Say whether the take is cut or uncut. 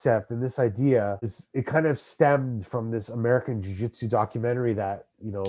cut